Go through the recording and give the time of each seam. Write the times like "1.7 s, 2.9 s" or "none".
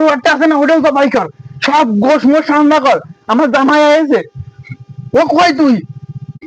none